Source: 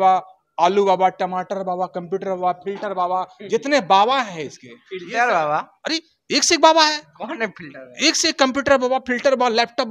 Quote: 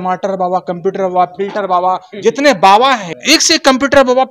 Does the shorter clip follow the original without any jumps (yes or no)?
no